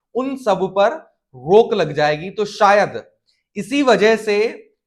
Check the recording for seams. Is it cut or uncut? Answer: uncut